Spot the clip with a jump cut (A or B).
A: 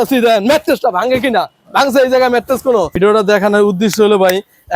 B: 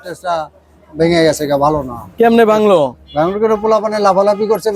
A